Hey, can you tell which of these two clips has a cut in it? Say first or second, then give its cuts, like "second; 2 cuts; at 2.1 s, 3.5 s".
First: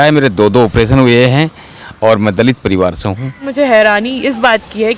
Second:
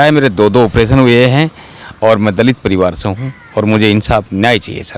first; 1 cut; at 3.4 s